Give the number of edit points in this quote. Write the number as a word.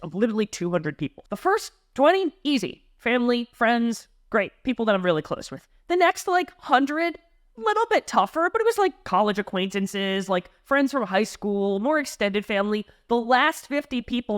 one